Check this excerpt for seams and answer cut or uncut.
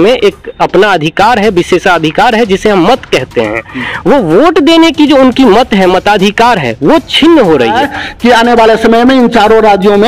cut